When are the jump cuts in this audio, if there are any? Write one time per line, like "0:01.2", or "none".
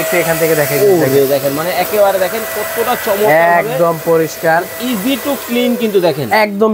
none